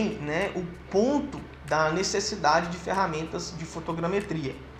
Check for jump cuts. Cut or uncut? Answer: uncut